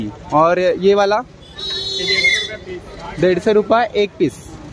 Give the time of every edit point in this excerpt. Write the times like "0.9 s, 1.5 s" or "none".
none